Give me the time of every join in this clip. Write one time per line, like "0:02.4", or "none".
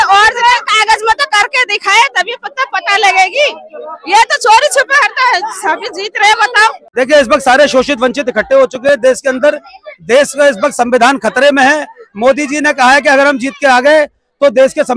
0:06.8